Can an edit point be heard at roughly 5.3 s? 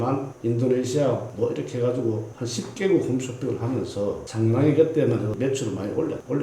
yes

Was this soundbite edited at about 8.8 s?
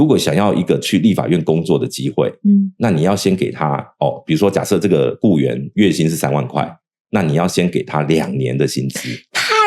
no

